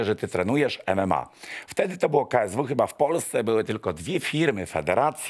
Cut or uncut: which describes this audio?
uncut